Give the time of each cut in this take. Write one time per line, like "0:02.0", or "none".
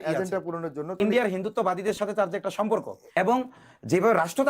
0:01.0
0:03.1